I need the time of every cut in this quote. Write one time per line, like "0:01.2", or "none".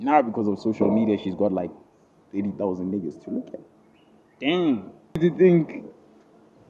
0:05.2